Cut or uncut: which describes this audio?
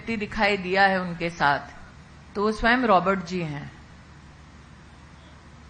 uncut